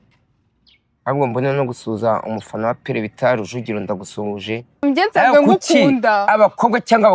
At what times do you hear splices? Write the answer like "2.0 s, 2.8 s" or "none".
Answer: 4.8 s